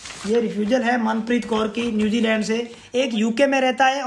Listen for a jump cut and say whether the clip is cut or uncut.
cut